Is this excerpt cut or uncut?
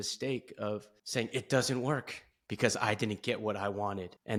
uncut